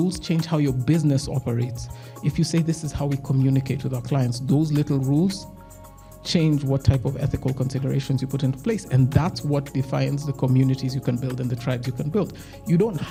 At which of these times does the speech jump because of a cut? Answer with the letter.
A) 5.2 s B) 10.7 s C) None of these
C